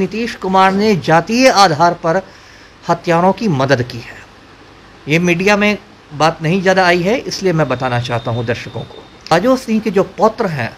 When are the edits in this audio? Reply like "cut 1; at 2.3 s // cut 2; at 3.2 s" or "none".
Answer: cut 1; at 9.3 s